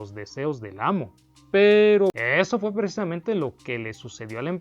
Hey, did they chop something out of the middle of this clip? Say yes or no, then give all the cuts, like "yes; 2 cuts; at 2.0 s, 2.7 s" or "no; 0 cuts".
yes; 1 cut; at 2.2 s